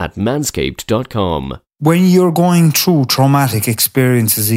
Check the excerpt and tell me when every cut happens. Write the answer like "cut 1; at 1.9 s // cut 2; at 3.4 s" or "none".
cut 1; at 1.7 s